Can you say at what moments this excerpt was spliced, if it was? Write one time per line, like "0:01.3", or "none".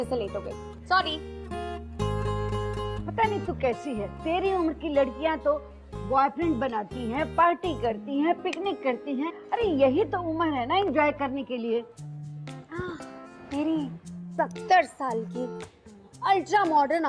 0:07.3